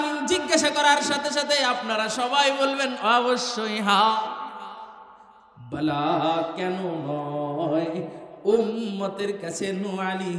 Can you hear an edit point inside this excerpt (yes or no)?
no